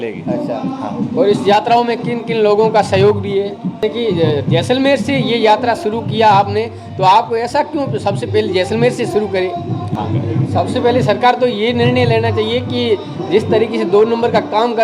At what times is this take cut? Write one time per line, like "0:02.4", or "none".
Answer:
0:03.8
0:10.0